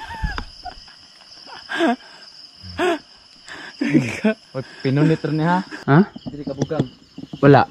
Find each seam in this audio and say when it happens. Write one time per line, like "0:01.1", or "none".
0:05.7